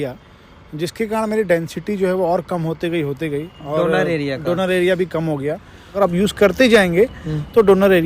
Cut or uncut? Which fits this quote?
cut